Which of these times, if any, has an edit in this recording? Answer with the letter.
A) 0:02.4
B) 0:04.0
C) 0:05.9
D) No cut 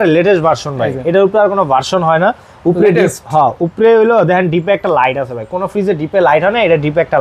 D